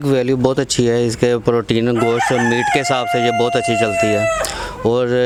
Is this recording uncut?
yes; 0 cuts

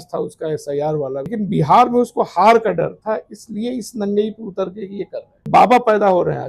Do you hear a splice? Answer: yes; 2 cuts; at 1.3 s, 5.5 s

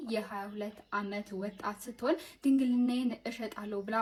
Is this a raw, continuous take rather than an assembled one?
yes; 0 cuts

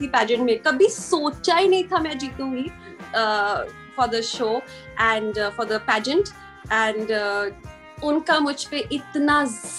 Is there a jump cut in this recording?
yes; 1 cut; at 2.9 s

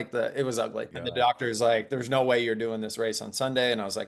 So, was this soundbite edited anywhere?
yes; 1 cut; at 1.0 s

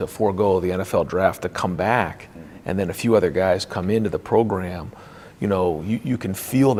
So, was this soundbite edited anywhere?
no; 0 cuts

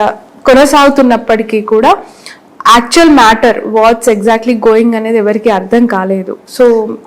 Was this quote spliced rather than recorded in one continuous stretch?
no; 0 cuts

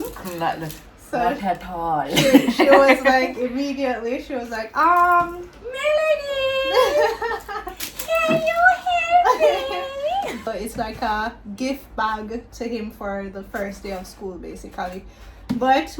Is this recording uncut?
no; 1 cut; at 10.5 s

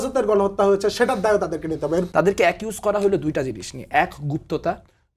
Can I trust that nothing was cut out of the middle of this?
no; 1 cut; at 2.1 s

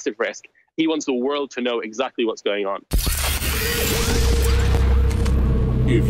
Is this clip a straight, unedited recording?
no; 1 cut; at 3.0 s

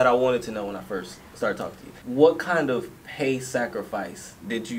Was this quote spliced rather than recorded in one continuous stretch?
yes; 1 cut; at 1.9 s

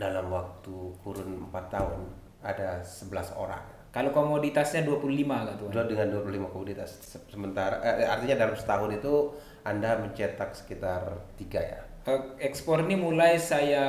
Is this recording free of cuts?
yes; 0 cuts

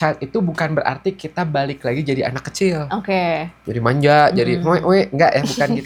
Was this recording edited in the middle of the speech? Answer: no; 0 cuts

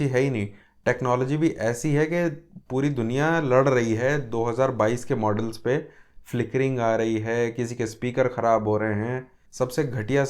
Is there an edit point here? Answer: yes; 1 cut; at 9.4 s

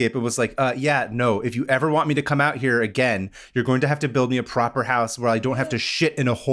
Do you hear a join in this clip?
no; 0 cuts

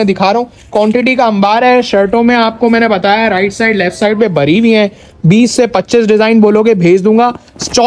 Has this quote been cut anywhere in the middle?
no; 0 cuts

